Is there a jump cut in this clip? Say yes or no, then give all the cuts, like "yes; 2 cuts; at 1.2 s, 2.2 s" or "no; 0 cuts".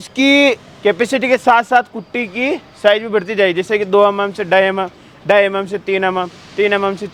no; 0 cuts